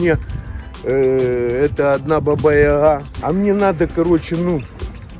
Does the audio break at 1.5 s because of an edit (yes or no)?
no